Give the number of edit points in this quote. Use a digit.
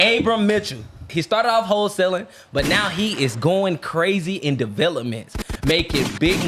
1